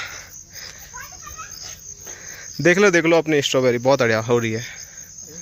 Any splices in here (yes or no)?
no